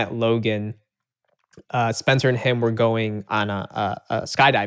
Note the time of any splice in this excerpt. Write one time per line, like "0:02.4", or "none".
0:03.2